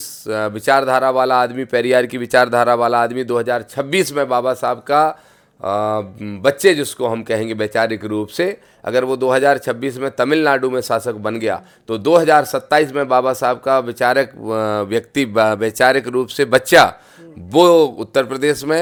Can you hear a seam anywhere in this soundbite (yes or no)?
no